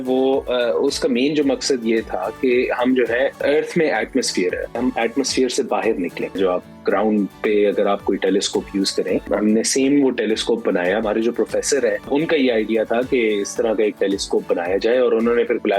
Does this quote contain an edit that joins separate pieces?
yes; 6 cuts; at 3.4 s, 4.8 s, 6.4 s, 9.2 s, 11.0 s, 12.1 s

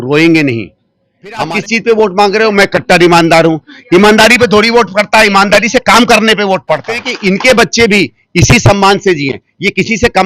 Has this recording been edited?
yes; 2 cuts; at 1.5 s, 7.0 s

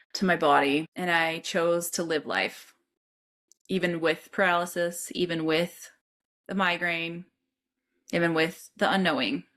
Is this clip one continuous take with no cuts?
yes; 0 cuts

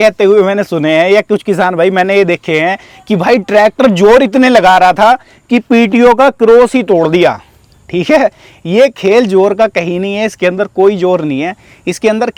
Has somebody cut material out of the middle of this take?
no; 0 cuts

